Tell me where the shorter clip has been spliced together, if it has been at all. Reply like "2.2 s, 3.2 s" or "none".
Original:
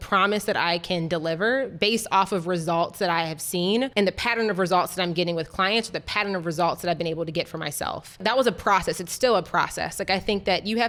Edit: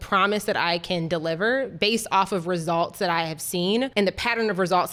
none